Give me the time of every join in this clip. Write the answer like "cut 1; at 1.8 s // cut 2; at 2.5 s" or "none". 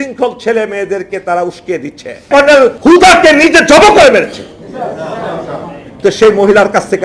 cut 1; at 2.3 s